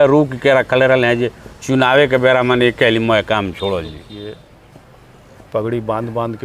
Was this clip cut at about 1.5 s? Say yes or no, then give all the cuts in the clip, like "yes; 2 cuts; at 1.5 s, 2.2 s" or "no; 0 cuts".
no; 1 cut; at 4.1 s